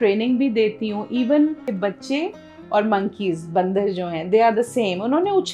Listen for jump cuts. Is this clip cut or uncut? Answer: cut